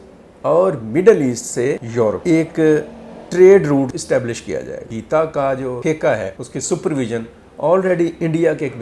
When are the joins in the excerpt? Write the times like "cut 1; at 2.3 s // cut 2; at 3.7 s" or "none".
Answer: cut 1; at 2.2 s // cut 2; at 3.9 s // cut 3; at 5.0 s // cut 4; at 5.8 s // cut 5; at 6.5 s